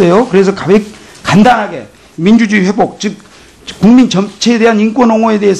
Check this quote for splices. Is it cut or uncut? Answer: cut